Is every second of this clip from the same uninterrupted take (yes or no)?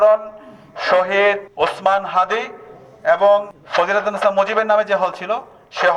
no